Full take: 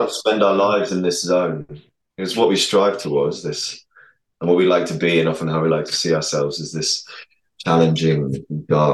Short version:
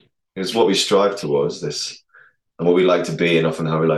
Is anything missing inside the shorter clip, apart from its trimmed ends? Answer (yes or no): no